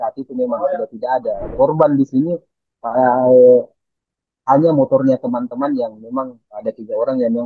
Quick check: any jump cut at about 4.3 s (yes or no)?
no